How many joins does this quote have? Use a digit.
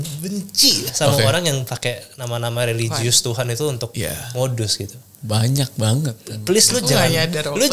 0